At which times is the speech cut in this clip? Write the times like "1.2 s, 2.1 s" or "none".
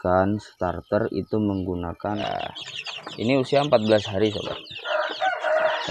2.2 s

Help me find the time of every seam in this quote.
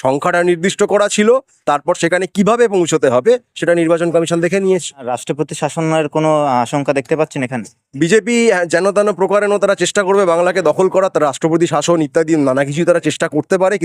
5.2 s

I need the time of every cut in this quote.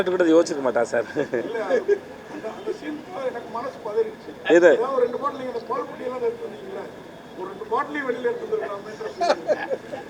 none

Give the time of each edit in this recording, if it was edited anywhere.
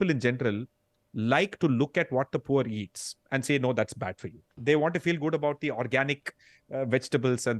4.5 s

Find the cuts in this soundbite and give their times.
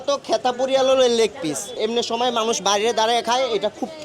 1.8 s

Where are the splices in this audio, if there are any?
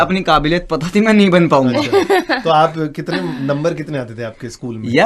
none

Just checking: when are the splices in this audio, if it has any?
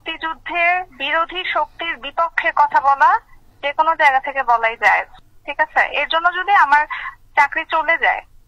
1.0 s

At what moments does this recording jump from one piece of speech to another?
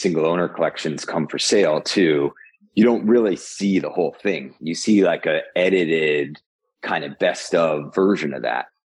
none

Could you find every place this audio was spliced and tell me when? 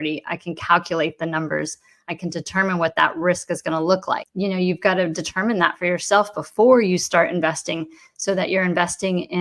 4.3 s

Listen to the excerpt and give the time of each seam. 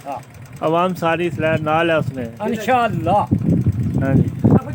none

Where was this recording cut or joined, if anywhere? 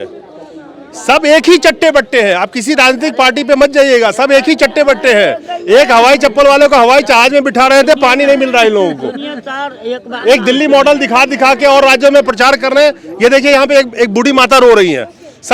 none

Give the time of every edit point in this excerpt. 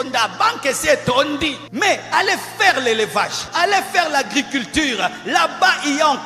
1.6 s, 3.4 s

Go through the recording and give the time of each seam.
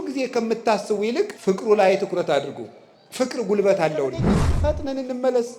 1.3 s, 4.5 s

